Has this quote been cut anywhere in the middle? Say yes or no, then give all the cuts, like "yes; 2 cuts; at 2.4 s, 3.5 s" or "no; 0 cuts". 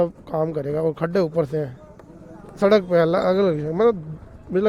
no; 0 cuts